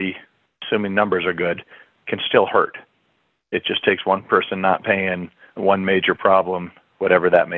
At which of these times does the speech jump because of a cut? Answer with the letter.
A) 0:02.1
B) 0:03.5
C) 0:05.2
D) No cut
B